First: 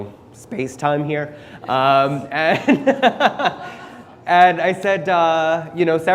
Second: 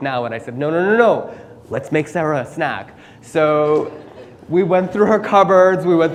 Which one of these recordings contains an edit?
first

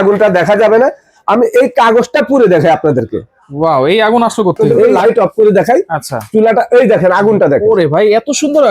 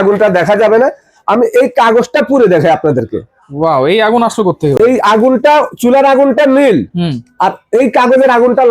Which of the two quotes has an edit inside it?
first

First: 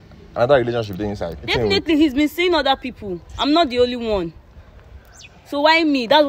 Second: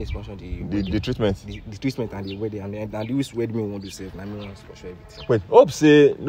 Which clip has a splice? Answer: first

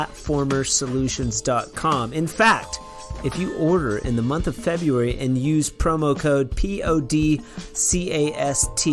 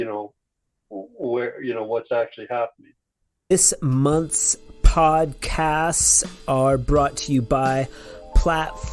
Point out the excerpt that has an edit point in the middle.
second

